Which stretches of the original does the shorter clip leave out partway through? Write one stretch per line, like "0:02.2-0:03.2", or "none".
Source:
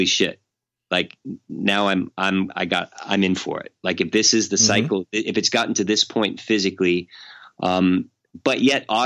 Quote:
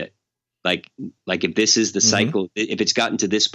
0:01.4-0:03.7